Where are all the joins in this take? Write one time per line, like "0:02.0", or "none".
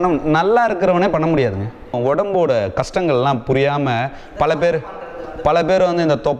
0:01.9